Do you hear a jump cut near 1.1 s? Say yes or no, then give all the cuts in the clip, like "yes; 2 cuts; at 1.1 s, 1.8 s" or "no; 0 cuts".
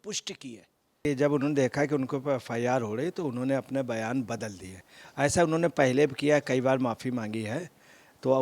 yes; 1 cut; at 1.1 s